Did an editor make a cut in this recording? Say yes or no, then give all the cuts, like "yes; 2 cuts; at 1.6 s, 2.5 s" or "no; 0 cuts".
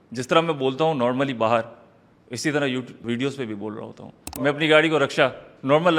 yes; 2 cuts; at 3.0 s, 4.4 s